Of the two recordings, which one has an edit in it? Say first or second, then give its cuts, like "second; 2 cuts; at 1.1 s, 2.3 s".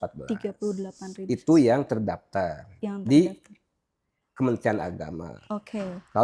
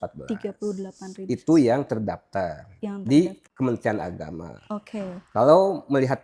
second; 1 cut; at 3.4 s